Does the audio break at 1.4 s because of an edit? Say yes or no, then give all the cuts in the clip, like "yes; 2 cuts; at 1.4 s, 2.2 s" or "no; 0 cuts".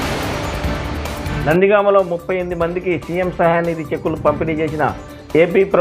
yes; 1 cut; at 1.4 s